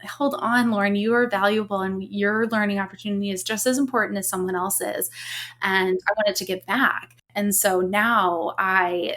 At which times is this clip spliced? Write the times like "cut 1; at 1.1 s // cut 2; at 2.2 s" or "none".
cut 1; at 7.2 s